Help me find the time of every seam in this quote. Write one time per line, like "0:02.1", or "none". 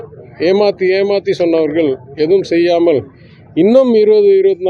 none